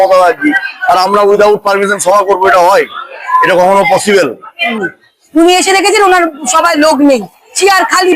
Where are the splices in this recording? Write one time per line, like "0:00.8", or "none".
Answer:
0:04.7